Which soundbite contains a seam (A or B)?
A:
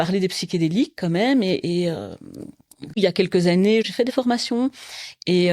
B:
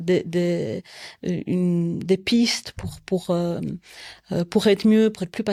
A